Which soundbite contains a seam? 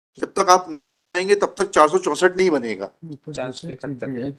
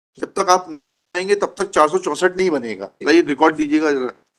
second; 1 cut; at 2.9 s

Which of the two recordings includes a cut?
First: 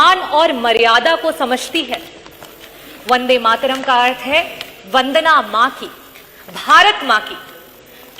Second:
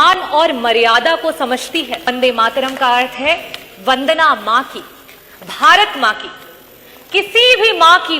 second; 1 cut; at 2.1 s

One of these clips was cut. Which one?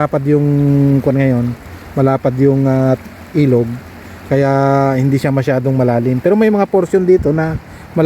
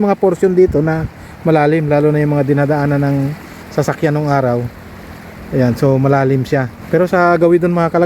second; 1 cut; at 6.8 s

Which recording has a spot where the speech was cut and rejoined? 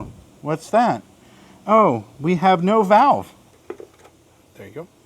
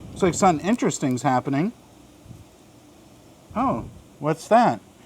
first; 1 cut; at 3.5 s

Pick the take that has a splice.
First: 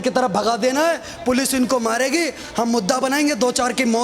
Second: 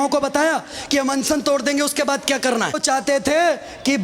second; 1 cut; at 2.8 s

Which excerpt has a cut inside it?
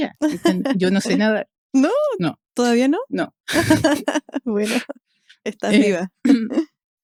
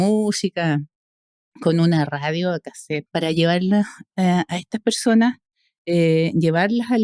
second; 1 cut; at 3.0 s

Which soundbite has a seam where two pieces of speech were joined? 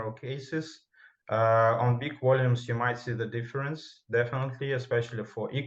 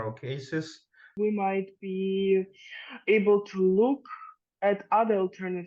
second; 1 cut; at 1.1 s

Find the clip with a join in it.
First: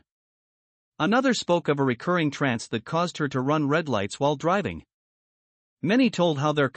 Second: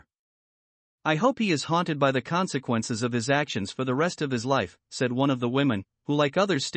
second; 1 cut; at 4.2 s

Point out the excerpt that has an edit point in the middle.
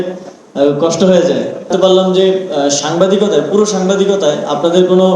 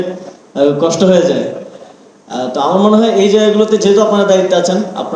first; 1 cut; at 1.7 s

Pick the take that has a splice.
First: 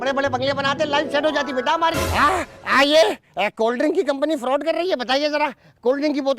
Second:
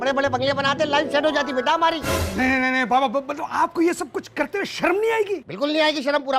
first; 1 cut; at 1.9 s

